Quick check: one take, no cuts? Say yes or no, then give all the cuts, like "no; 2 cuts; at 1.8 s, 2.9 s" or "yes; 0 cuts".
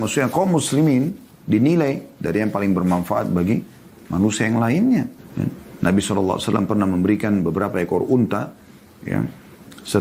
no; 1 cut; at 5.2 s